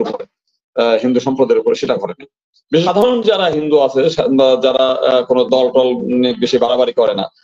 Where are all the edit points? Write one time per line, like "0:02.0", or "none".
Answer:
0:02.9